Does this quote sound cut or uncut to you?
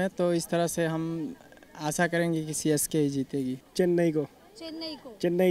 uncut